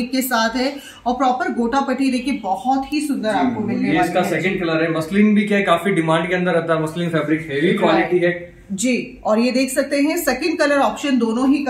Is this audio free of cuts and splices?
yes; 0 cuts

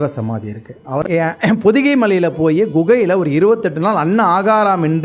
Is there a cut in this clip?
yes; 1 cut; at 1.0 s

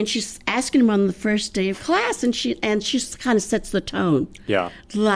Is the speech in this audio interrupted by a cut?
no; 0 cuts

